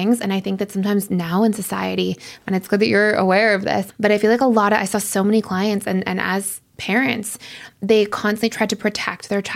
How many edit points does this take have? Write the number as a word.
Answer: one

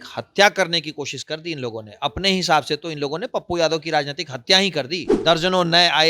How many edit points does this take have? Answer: one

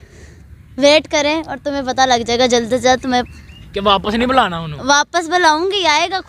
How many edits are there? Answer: zero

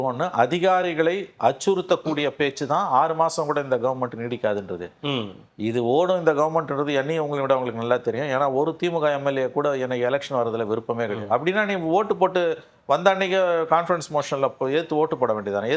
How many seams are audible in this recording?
zero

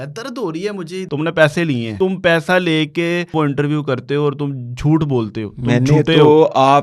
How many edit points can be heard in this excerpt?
three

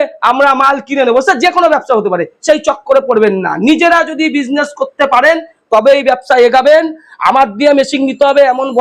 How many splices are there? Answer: zero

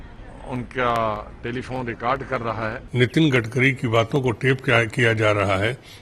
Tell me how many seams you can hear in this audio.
one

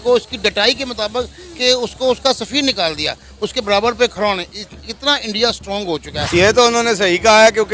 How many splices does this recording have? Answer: one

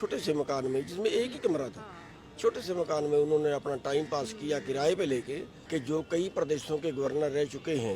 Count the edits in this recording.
one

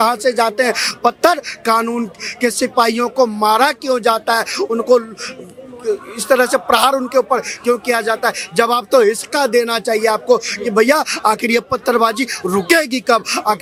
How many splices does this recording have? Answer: zero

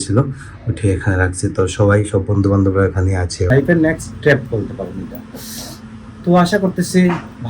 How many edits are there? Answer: one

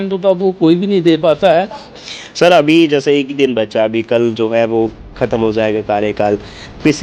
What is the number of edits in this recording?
one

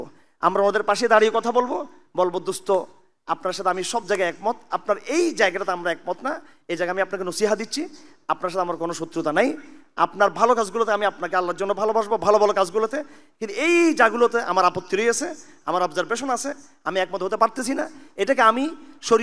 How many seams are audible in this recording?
zero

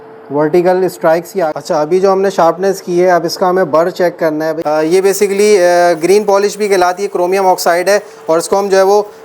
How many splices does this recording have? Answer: two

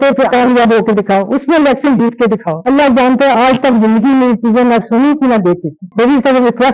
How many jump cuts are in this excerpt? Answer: two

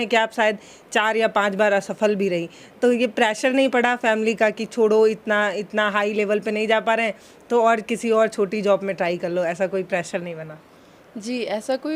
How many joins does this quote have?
zero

